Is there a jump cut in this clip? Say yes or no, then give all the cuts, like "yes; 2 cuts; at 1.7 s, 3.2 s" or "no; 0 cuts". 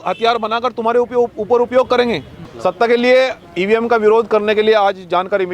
yes; 1 cut; at 2.3 s